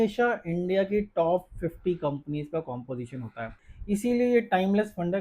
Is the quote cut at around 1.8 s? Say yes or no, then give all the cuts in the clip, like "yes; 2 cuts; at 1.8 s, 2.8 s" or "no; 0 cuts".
no; 1 cut; at 3.7 s